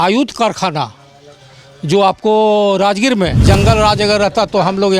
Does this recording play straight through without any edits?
no; 1 cut; at 3.4 s

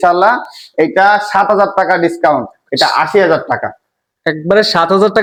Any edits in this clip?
no; 0 cuts

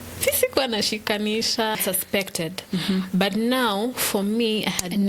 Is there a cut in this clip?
yes; 1 cut; at 1.8 s

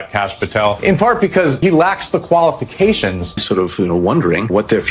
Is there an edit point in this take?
yes; 1 cut; at 3.4 s

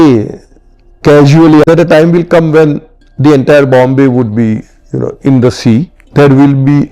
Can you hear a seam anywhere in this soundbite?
yes; 2 cuts; at 1.6 s, 6.0 s

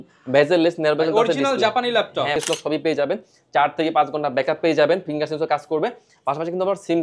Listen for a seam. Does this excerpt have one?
yes; 1 cut; at 2.4 s

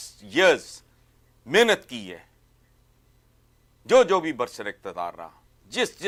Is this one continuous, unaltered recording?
yes; 0 cuts

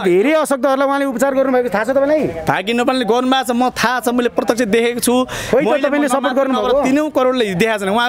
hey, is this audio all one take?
yes; 0 cuts

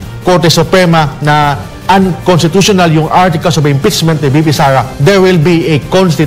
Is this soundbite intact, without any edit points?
yes; 0 cuts

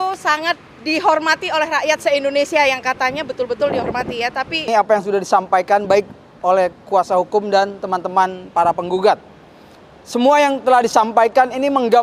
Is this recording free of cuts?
no; 1 cut; at 4.7 s

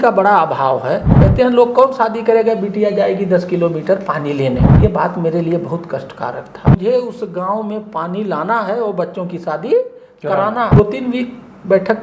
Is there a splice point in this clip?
yes; 4 cuts; at 1.2 s, 4.7 s, 6.6 s, 10.8 s

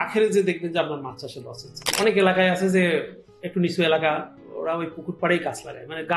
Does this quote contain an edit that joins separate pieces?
yes; 1 cut; at 1.9 s

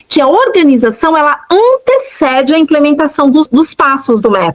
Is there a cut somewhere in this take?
yes; 1 cut; at 3.5 s

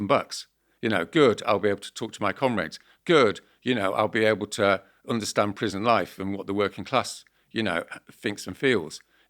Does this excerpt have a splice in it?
no; 0 cuts

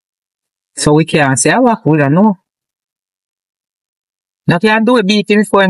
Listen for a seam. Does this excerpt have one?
no; 0 cuts

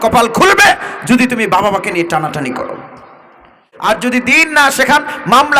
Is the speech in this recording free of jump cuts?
no; 1 cut; at 3.7 s

